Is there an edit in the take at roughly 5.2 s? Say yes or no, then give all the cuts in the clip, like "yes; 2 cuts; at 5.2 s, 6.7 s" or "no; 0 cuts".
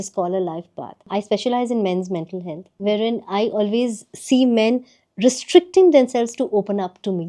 no; 2 cuts; at 1.1 s, 2.6 s